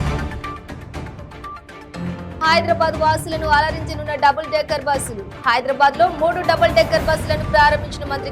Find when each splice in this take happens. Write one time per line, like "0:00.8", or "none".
0:02.4

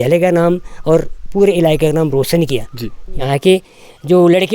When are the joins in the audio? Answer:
0:03.3

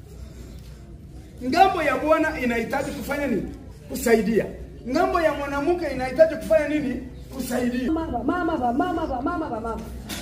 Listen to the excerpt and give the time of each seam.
0:07.9

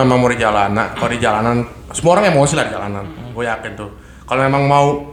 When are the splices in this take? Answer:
none

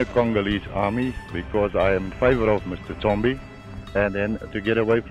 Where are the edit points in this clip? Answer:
none

